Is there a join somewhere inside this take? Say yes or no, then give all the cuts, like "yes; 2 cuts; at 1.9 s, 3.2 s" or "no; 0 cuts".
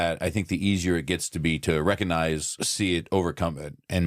yes; 1 cut; at 2.6 s